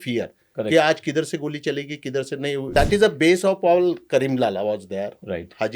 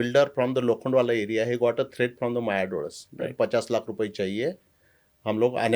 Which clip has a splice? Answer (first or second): first